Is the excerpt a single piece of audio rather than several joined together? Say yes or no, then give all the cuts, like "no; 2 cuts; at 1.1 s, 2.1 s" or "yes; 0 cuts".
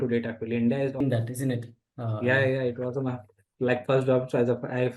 no; 1 cut; at 1.0 s